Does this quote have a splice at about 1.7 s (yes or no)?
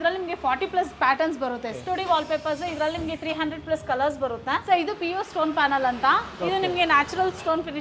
yes